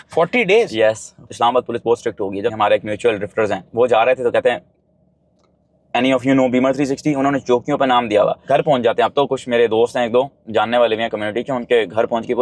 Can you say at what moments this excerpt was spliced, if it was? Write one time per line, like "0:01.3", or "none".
0:01.3
0:02.5
0:08.4